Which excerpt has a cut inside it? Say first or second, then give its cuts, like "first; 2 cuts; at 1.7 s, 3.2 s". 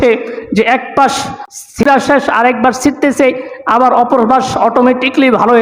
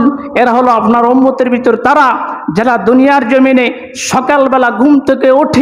first; 1 cut; at 1.9 s